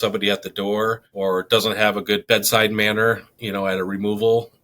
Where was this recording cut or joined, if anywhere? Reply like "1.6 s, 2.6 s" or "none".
1.1 s, 2.2 s